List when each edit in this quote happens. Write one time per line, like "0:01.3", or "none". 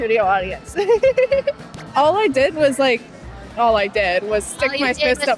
0:01.7